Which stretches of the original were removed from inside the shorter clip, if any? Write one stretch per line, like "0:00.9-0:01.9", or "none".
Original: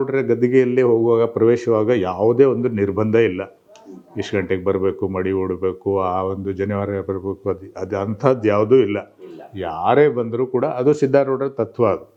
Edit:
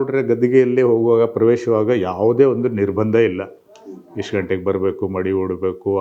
none